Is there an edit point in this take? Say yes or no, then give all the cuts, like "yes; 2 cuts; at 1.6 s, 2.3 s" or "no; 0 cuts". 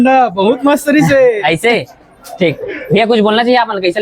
no; 0 cuts